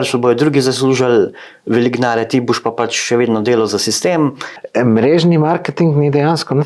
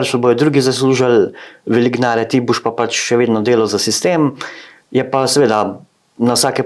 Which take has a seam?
first; 1 cut; at 4.6 s

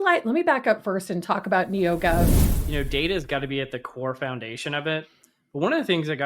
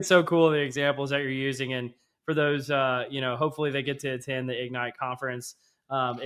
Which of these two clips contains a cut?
first; 1 cut; at 2.3 s

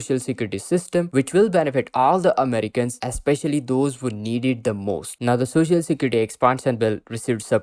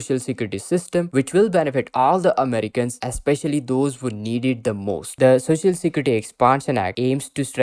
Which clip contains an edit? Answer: second; 1 cut; at 5.1 s

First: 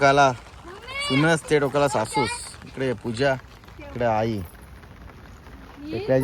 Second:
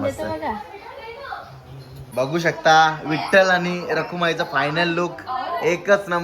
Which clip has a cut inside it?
second; 1 cut; at 2.1 s

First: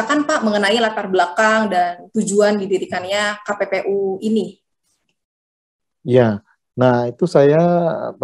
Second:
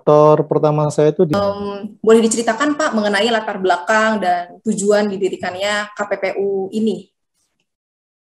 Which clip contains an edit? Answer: second; 1 cut; at 1.3 s

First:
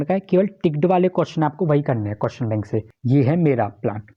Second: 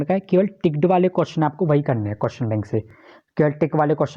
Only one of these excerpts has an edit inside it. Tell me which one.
first; 1 cut; at 2.9 s

